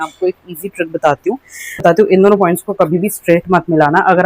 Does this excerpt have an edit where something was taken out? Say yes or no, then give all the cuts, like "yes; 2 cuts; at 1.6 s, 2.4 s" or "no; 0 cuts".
yes; 1 cut; at 1.8 s